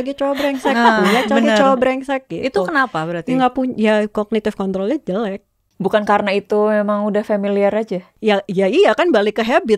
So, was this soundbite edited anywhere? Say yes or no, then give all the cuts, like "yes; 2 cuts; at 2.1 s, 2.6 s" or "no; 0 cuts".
no; 0 cuts